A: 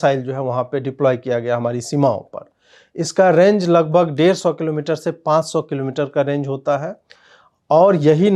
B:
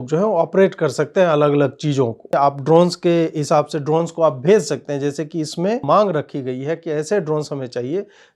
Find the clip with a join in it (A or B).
B